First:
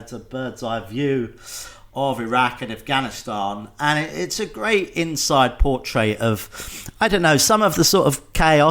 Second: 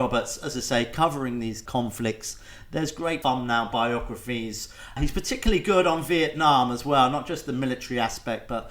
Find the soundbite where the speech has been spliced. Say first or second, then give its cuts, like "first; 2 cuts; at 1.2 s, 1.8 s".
second; 3 cuts; at 1.6 s, 3.2 s, 5.0 s